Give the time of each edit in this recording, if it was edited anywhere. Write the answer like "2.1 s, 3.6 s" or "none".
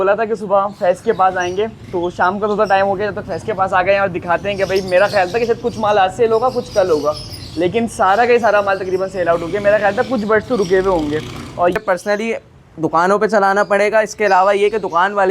11.8 s